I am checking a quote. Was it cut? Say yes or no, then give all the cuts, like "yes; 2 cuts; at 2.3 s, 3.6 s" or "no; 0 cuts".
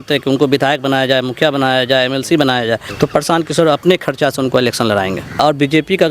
yes; 2 cuts; at 2.9 s, 5.4 s